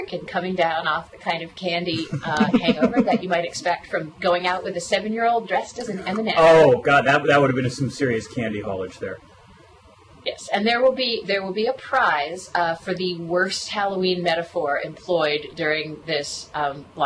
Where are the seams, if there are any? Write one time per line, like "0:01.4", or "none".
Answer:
none